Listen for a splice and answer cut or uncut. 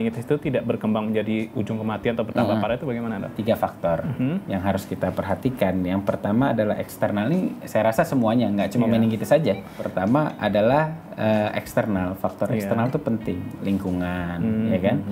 cut